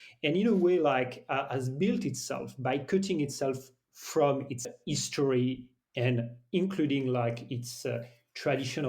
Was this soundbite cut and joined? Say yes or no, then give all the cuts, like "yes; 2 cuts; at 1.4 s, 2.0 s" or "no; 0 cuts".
yes; 1 cut; at 4.7 s